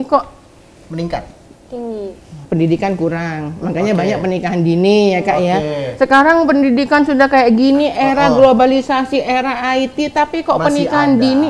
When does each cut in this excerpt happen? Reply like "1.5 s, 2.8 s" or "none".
2.4 s